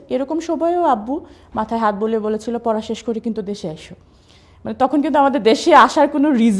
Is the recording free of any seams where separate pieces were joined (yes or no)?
yes